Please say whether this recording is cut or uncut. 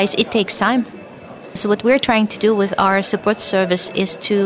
cut